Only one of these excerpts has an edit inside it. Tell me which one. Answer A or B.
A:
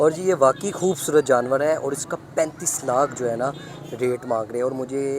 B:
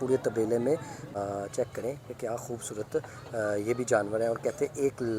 B